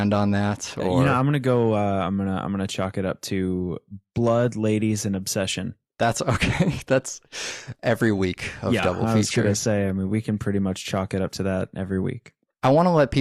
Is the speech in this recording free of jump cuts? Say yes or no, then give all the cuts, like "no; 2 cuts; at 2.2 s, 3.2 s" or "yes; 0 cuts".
no; 1 cut; at 8.0 s